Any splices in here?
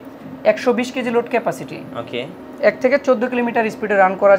no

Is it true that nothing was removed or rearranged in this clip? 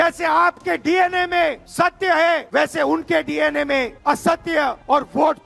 yes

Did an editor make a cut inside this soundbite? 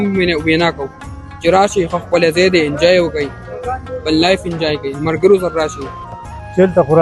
yes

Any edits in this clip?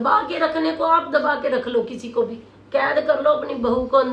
no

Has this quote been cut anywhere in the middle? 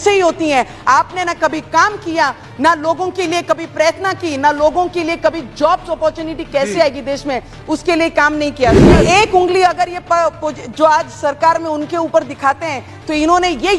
yes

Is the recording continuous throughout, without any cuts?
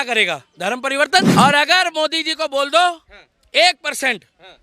no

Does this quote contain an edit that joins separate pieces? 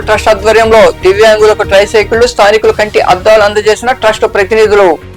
no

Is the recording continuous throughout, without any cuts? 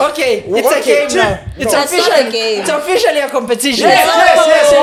yes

